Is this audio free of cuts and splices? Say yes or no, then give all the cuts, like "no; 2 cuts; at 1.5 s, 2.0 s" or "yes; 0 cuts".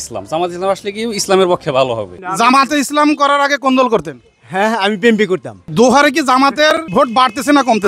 no; 3 cuts; at 2.1 s, 5.7 s, 6.9 s